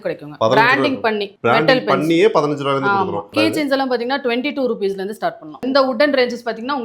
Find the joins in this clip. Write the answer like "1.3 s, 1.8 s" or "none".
3.2 s, 5.6 s